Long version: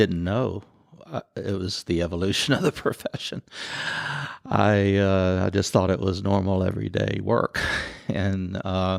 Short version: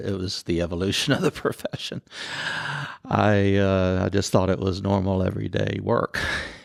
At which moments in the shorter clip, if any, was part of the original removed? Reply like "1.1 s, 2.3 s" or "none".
none